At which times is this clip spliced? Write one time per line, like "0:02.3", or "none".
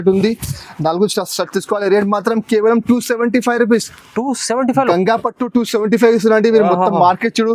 none